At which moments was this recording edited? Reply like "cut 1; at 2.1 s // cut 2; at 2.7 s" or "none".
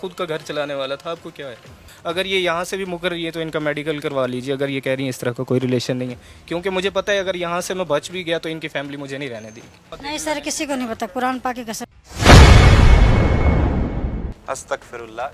cut 1; at 1.8 s // cut 2; at 9.9 s